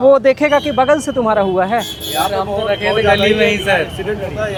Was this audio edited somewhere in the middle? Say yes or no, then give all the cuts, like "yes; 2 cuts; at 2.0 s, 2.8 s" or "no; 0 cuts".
no; 0 cuts